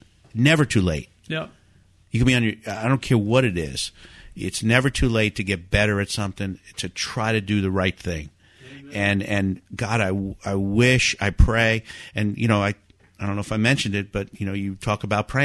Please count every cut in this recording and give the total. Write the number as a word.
zero